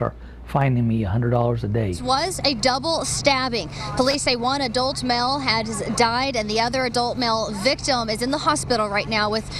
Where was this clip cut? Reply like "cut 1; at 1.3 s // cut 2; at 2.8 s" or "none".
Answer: cut 1; at 2.0 s